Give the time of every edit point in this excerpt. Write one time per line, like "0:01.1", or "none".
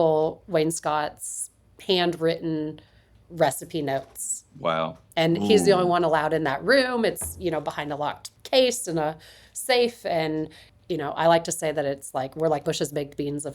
0:08.3
0:10.6
0:12.6